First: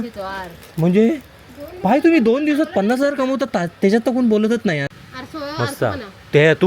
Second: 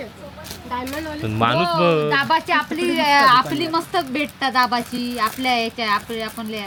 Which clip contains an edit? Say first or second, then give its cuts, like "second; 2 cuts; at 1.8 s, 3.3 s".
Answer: first; 1 cut; at 4.9 s